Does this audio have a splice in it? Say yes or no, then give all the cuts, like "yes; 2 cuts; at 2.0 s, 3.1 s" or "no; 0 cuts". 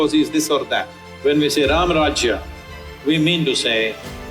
yes; 1 cut; at 1.0 s